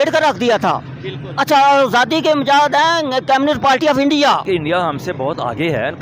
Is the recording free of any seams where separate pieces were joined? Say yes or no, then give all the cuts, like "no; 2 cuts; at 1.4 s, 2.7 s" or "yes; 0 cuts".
no; 1 cut; at 4.4 s